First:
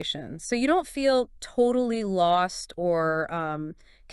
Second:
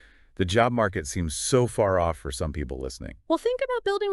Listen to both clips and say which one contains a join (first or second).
first